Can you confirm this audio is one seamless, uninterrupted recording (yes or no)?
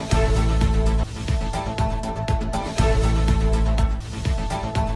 yes